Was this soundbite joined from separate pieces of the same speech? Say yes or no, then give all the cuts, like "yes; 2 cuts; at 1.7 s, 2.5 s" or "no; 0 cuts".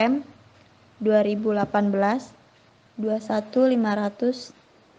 yes; 1 cut; at 3.8 s